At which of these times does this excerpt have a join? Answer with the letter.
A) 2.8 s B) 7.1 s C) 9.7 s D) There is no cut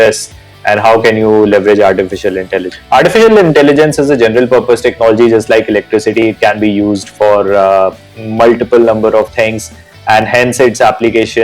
A